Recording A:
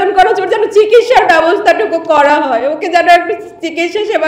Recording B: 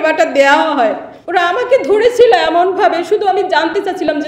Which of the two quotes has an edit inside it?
B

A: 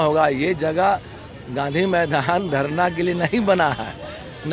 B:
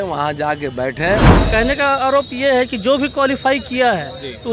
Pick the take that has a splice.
B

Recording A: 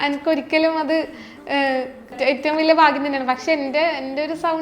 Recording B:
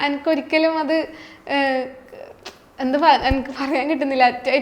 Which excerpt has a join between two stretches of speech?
A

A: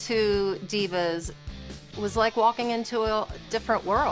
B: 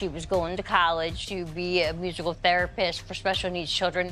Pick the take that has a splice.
B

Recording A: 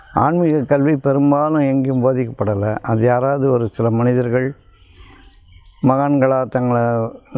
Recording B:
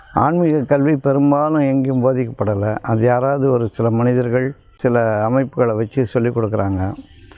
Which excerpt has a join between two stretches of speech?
B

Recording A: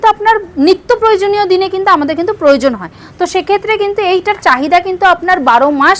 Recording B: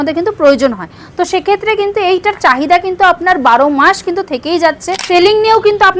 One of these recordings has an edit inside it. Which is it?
B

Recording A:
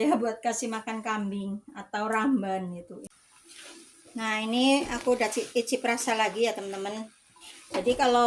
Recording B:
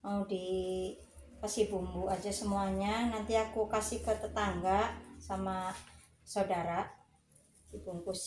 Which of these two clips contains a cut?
A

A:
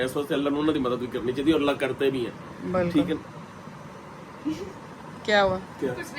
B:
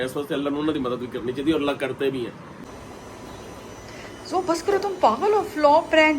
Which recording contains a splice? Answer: B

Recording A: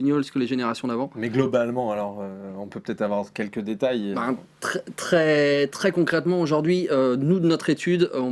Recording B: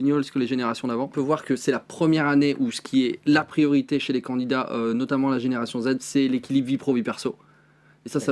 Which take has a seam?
B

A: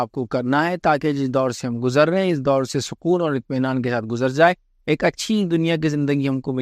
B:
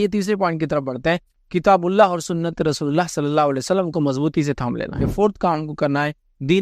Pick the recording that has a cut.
B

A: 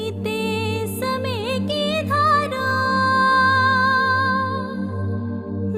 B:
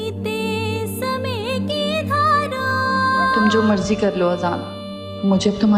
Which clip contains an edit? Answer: B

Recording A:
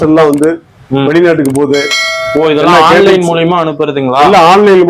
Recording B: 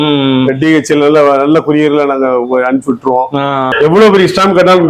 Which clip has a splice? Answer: B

